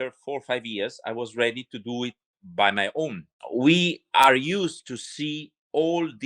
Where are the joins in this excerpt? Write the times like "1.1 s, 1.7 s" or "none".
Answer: 3.3 s